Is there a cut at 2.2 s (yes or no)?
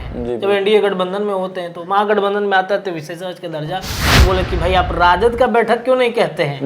no